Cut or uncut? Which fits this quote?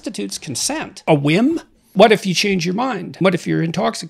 cut